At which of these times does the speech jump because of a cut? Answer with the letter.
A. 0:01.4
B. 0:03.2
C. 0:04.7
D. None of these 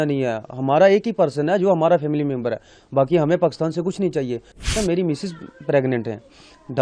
C